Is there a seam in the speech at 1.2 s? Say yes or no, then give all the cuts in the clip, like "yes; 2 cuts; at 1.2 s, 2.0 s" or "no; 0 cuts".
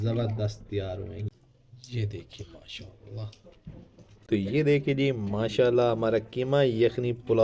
yes; 2 cuts; at 1.2 s, 4.1 s